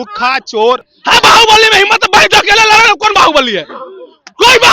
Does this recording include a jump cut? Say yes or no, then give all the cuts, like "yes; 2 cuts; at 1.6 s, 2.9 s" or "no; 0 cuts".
yes; 1 cut; at 0.9 s